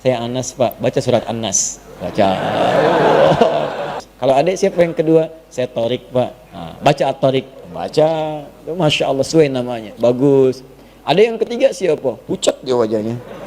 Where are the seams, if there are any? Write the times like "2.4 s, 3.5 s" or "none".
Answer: 4.0 s